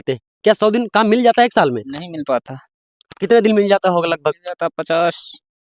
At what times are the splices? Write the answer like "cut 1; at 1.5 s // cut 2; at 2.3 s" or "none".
none